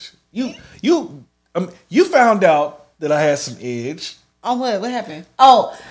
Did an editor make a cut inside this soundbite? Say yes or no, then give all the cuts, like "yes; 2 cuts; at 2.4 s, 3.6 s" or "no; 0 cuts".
no; 0 cuts